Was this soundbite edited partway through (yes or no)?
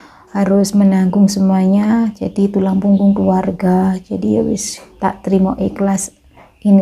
no